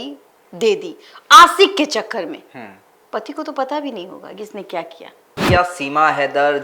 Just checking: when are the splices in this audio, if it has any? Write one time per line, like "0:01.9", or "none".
0:05.4